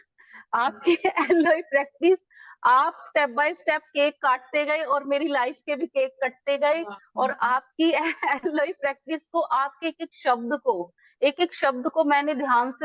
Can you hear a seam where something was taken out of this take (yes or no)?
no